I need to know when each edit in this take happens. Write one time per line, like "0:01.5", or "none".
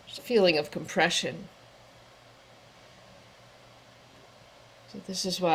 none